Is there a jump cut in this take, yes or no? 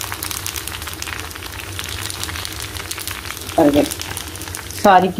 no